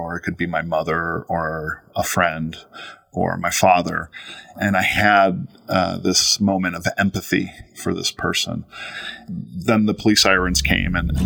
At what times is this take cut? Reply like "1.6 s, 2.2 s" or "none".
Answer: 4.5 s, 9.2 s